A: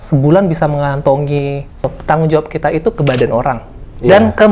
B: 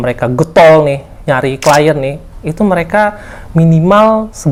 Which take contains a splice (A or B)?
A